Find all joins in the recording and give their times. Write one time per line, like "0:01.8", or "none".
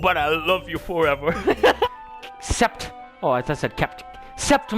0:01.9